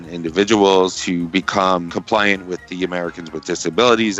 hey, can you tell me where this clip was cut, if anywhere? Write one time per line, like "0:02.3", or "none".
0:01.9